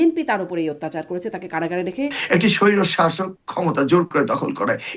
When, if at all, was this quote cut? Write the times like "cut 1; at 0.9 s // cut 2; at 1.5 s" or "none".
cut 1; at 2.2 s